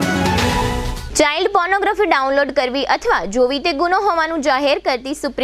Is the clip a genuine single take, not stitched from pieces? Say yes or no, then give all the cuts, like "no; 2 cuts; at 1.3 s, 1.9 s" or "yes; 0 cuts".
yes; 0 cuts